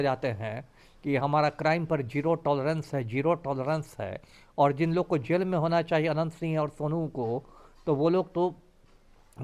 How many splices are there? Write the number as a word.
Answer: zero